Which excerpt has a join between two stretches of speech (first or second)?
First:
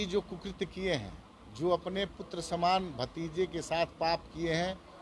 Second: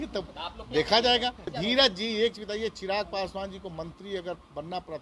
second